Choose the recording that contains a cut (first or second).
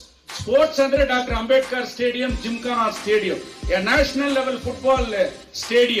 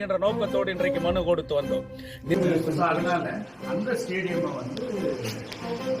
second